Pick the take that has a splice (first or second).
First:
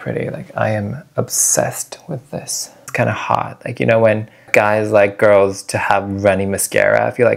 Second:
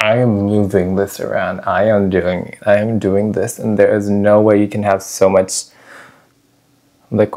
first